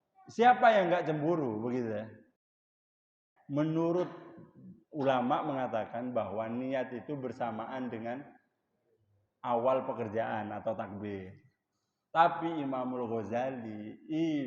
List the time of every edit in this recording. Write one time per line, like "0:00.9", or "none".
0:02.9